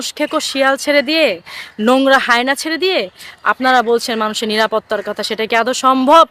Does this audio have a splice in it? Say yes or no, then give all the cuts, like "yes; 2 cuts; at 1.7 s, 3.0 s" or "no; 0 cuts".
no; 0 cuts